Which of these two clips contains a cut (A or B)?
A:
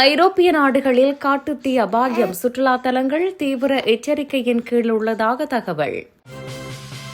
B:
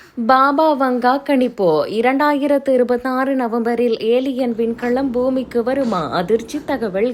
A